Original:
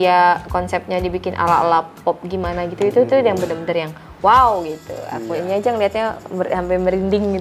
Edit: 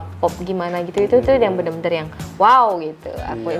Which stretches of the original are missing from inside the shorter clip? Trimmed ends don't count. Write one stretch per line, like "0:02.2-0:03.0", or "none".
none